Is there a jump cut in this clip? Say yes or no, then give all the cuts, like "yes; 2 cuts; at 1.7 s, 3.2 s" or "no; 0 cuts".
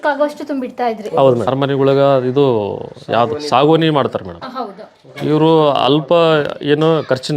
yes; 1 cut; at 1.5 s